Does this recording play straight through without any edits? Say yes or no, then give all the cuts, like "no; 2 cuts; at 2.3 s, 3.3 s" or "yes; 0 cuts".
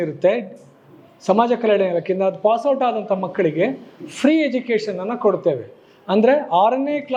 yes; 0 cuts